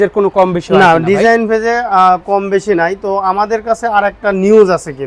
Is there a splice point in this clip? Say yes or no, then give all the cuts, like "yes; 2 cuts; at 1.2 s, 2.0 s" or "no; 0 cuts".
no; 0 cuts